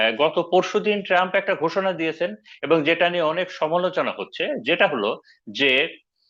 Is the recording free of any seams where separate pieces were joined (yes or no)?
yes